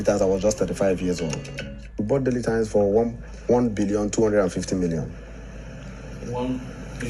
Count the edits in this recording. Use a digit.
1